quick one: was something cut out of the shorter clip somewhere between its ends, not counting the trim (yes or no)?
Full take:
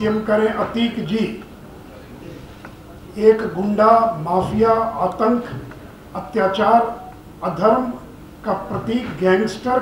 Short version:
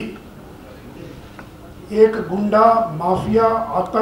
no